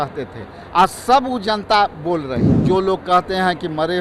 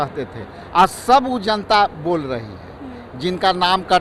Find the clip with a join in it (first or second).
first